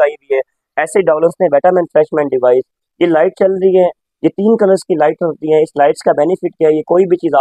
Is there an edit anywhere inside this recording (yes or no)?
no